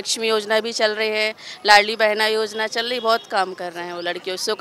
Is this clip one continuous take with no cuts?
yes; 0 cuts

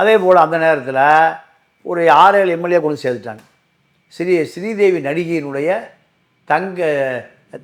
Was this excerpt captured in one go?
yes; 0 cuts

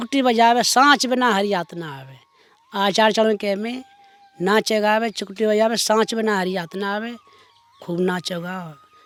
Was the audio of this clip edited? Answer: no; 0 cuts

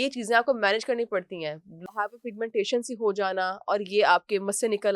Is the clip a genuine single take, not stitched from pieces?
no; 1 cut; at 1.9 s

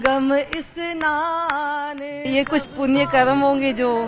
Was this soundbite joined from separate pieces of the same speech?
yes; 1 cut; at 2.1 s

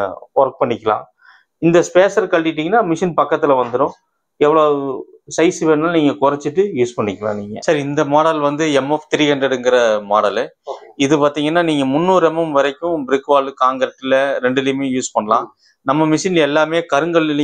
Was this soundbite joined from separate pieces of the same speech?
no; 0 cuts

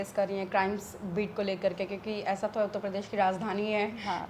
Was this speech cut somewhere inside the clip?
no; 0 cuts

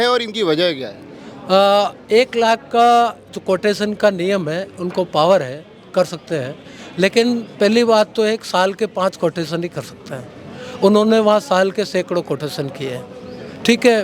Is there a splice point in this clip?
no; 0 cuts

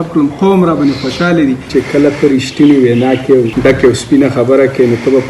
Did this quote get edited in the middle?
yes; 2 cuts; at 1.7 s, 3.5 s

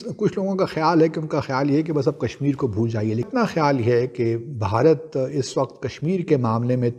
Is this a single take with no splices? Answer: yes; 0 cuts

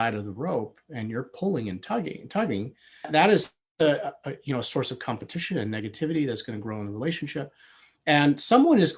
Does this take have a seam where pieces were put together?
no; 0 cuts

